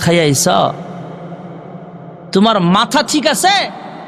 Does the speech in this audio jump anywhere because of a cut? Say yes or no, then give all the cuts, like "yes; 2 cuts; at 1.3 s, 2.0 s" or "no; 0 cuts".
no; 0 cuts